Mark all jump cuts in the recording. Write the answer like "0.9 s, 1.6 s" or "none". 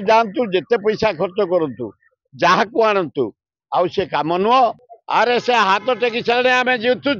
4.9 s